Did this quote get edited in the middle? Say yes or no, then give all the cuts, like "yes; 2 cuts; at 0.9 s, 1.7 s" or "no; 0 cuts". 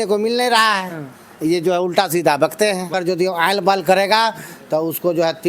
yes; 1 cut; at 2.9 s